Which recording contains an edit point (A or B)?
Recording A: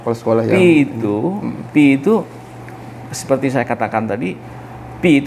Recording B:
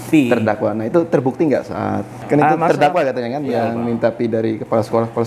B